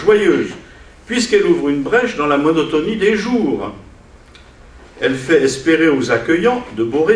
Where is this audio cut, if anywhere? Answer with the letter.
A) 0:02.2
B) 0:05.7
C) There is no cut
C